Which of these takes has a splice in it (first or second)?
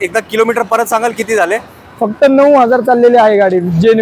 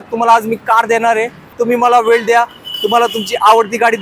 second